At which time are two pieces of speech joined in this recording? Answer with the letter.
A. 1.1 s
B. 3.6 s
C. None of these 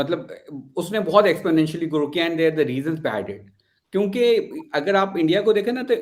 C